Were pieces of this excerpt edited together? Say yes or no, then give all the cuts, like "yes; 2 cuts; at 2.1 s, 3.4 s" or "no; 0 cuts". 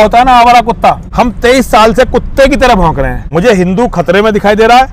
yes; 2 cuts; at 1.0 s, 3.2 s